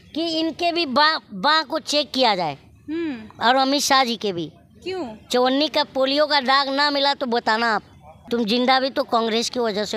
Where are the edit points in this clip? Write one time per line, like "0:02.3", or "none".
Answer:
0:08.1

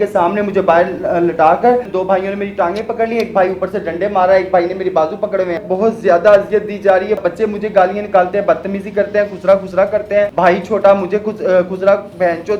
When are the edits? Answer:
0:01.9
0:05.7
0:07.2
0:10.3

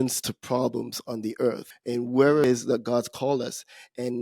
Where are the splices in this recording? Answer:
0:01.7
0:02.4

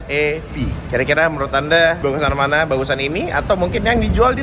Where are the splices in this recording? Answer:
none

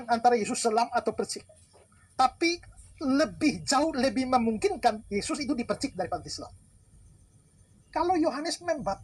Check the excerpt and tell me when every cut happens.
0:06.6

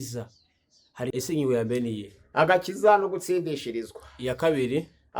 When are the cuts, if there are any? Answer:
0:01.1

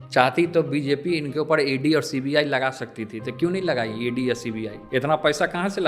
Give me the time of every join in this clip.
0:04.8

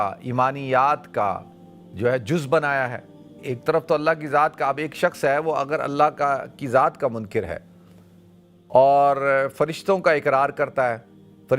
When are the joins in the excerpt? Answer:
0:03.4

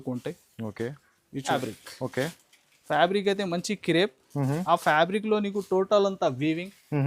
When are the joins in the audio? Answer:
0:01.5

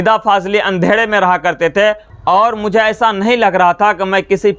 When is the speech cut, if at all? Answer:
0:02.1

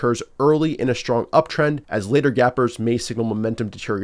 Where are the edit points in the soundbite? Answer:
0:01.9

